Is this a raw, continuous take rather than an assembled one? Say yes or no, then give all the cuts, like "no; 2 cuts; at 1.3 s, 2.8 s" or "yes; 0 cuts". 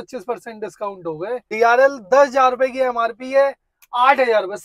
no; 1 cut; at 1.5 s